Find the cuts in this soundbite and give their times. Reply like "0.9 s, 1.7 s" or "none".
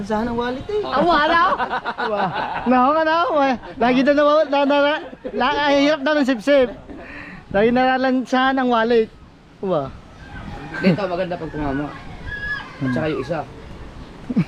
none